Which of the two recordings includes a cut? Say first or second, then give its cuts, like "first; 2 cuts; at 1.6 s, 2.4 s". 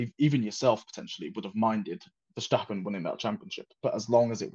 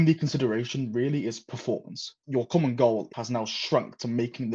second; 2 cuts; at 2.2 s, 3.1 s